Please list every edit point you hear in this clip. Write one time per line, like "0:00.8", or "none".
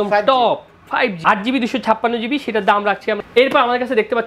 0:01.2
0:03.2